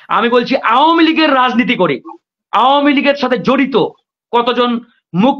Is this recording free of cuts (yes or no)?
yes